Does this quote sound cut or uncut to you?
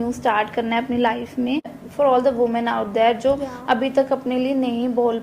cut